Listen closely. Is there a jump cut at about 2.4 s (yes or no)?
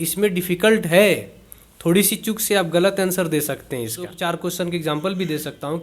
no